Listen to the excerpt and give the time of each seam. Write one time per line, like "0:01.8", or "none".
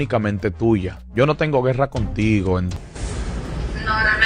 0:02.8